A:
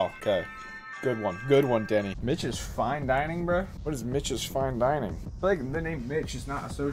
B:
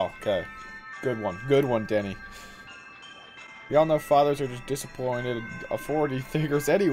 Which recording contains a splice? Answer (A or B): A